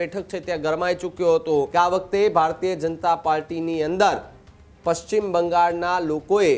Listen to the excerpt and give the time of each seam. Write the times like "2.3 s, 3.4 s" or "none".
1.7 s